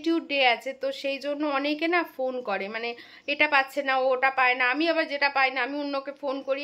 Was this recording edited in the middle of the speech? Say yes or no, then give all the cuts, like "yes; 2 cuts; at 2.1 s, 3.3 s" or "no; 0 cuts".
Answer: no; 0 cuts